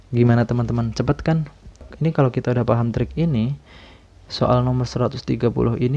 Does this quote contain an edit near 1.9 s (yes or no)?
yes